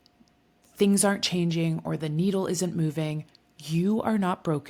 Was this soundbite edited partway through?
no; 0 cuts

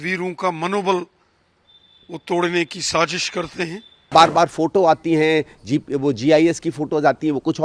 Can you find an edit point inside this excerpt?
yes; 1 cut; at 4.1 s

